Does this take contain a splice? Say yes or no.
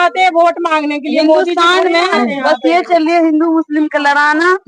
no